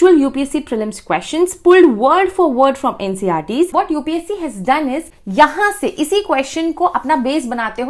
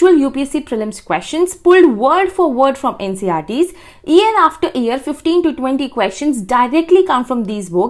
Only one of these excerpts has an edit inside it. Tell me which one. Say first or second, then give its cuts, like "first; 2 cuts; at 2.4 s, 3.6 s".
first; 2 cuts; at 3.7 s, 5.2 s